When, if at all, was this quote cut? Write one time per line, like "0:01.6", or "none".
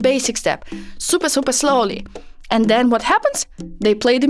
none